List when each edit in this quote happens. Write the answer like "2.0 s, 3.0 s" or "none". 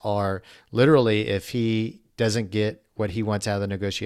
none